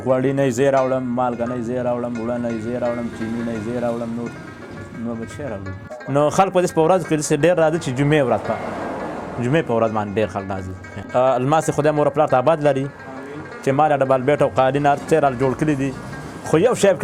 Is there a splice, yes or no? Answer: no